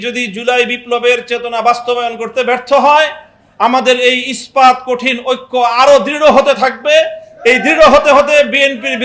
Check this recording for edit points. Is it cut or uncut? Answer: uncut